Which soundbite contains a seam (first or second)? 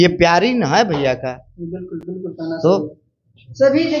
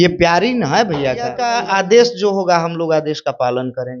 second